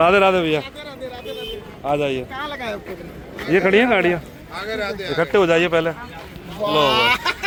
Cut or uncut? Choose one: uncut